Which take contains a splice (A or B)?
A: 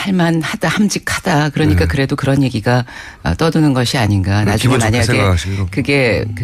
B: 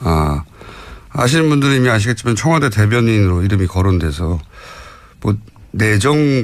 B